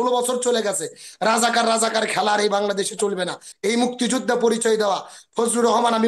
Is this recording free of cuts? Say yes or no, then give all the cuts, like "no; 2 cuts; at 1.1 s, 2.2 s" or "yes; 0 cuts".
no; 1 cut; at 3.5 s